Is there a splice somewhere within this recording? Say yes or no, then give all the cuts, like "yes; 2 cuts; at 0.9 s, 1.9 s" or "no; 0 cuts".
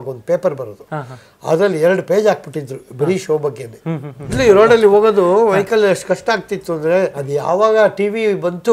yes; 2 cuts; at 4.4 s, 7.2 s